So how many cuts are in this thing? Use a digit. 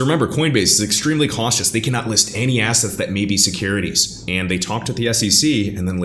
0